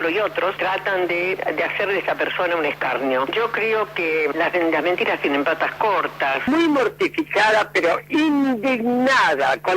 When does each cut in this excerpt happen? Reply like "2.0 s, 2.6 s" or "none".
6.4 s